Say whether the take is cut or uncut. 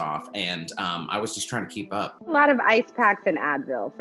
cut